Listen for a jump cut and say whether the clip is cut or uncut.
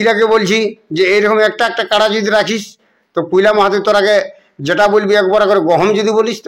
uncut